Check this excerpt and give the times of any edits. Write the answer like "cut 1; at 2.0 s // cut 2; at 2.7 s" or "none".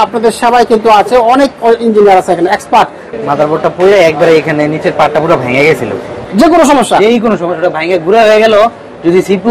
cut 1; at 3.1 s // cut 2; at 6.2 s